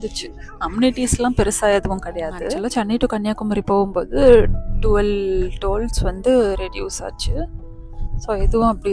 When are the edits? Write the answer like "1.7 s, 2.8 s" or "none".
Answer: 2.5 s